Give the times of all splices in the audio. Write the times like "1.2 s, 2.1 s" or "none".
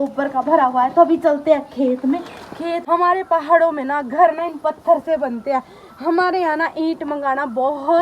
2.8 s